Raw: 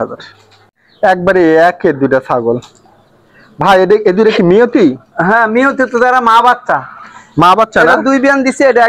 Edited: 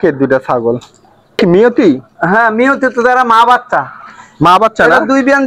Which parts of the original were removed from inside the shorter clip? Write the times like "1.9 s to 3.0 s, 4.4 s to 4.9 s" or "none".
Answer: 3.2 s to 4.3 s